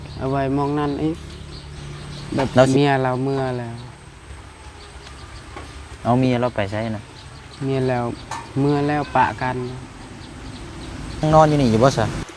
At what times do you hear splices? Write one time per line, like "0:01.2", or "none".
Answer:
0:02.7
0:11.2